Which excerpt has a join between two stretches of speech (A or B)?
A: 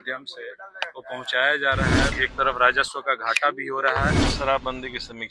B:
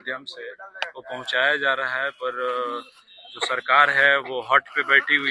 A